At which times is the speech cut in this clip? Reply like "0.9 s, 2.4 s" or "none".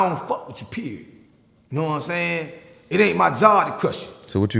none